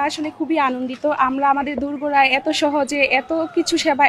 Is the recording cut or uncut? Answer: uncut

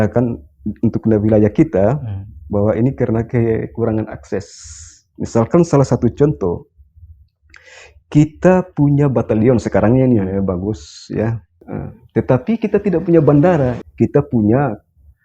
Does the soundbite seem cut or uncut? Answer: cut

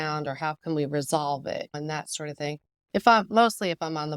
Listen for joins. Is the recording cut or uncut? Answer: cut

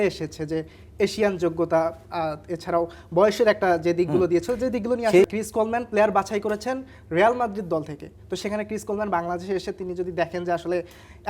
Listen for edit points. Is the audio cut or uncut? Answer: cut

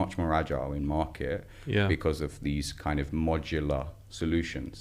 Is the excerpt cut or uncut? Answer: uncut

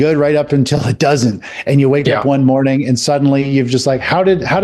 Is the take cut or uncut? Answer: uncut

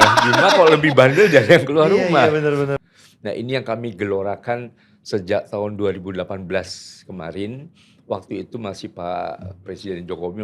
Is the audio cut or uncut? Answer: cut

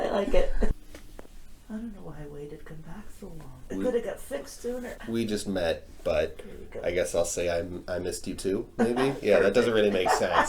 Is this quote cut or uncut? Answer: cut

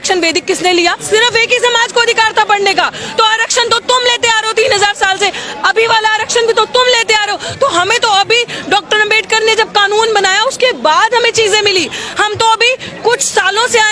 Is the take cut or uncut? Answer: uncut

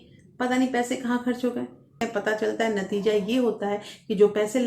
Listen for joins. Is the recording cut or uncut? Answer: cut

